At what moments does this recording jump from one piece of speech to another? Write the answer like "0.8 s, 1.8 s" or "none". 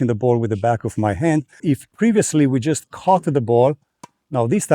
1.6 s

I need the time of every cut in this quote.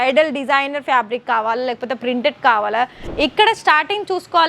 3.0 s

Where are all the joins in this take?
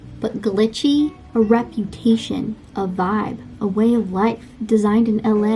1.3 s

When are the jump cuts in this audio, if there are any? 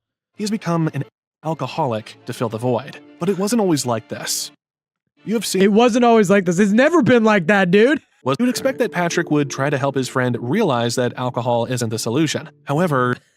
8.1 s

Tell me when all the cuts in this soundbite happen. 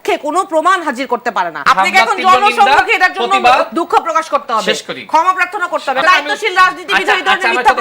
1.6 s, 6.0 s

